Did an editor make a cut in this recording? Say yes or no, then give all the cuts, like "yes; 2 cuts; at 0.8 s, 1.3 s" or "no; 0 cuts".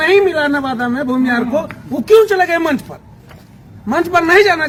no; 0 cuts